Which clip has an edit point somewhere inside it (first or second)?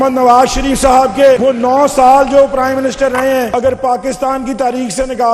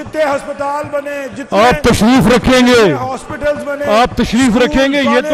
first